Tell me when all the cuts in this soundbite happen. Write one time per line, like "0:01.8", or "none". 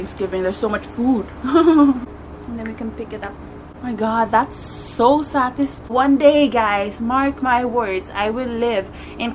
0:02.1
0:03.7
0:05.9